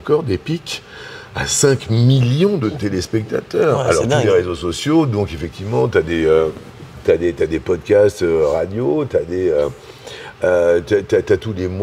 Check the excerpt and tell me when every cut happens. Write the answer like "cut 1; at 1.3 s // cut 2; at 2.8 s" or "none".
none